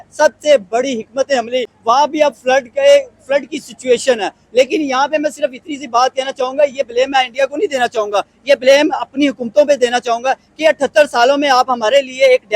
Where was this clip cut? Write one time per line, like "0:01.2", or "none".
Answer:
0:01.7